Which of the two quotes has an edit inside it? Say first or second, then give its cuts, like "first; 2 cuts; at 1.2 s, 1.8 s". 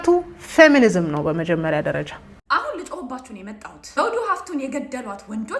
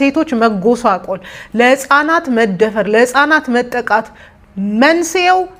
first; 1 cut; at 2.4 s